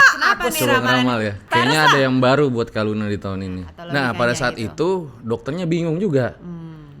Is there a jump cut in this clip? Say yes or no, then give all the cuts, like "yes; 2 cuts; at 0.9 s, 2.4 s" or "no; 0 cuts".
yes; 2 cuts; at 1.4 s, 3.7 s